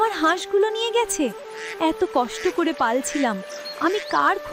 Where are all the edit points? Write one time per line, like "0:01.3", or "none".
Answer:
none